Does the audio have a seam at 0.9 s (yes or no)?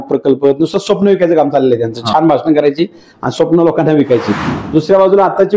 no